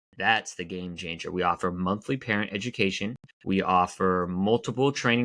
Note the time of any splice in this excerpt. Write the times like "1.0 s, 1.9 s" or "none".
3.3 s